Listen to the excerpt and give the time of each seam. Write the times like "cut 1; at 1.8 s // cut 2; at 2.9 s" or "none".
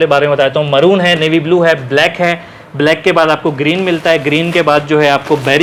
none